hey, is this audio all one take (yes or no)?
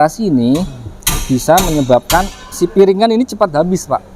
yes